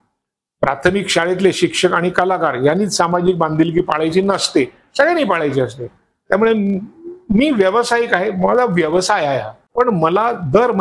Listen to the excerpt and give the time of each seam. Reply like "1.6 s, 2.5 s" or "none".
9.6 s